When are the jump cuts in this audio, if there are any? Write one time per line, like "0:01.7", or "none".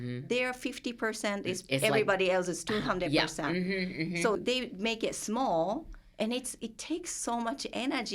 0:04.4

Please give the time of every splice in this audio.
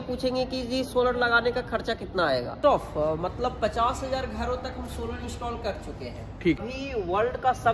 0:02.5
0:06.6

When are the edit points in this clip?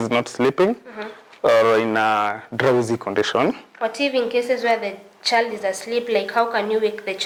none

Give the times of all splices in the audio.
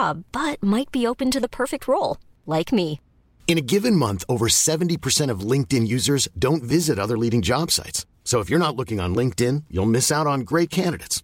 none

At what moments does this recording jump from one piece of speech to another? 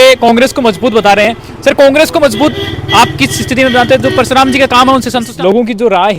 0:05.3

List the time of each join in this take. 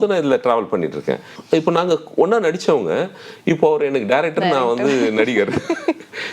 0:01.3

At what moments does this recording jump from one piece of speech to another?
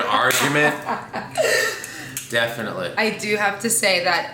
0:02.9

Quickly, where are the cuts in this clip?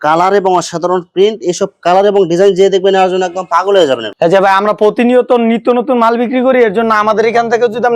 0:04.1

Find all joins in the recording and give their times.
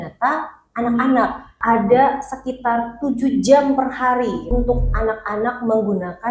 0:01.6
0:04.5

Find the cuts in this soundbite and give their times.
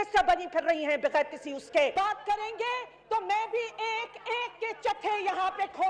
0:01.9

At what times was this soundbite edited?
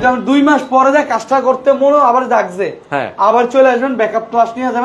none

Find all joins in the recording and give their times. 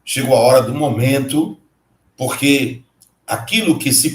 none

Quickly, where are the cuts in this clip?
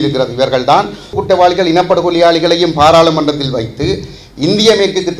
0:01.2

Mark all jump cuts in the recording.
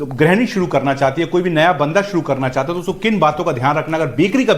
none

